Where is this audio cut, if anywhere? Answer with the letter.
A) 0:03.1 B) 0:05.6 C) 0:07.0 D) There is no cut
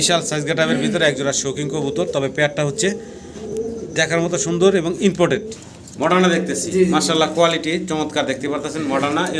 B